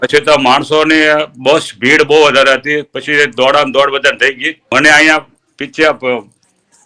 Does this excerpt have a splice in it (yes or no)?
yes